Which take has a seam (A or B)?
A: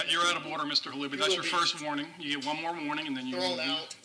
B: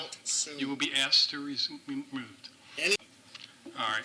B